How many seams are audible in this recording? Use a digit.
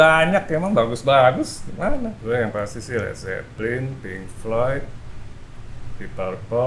1